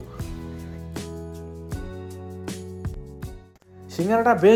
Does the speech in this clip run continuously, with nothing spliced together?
yes; 0 cuts

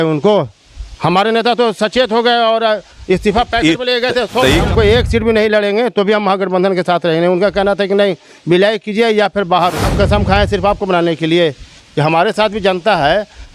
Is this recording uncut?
no; 2 cuts; at 4.7 s, 9.9 s

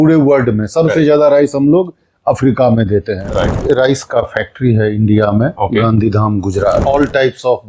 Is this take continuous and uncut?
no; 3 cuts; at 3.6 s, 5.5 s, 6.8 s

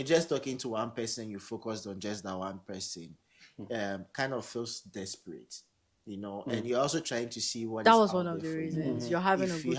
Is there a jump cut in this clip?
yes; 1 cut; at 7.8 s

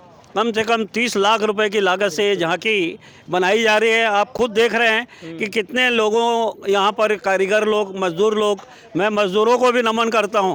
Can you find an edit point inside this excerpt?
no; 0 cuts

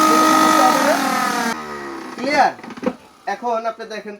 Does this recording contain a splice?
yes; 1 cut; at 1.5 s

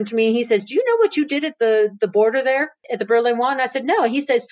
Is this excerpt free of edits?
no; 1 cut; at 2.8 s

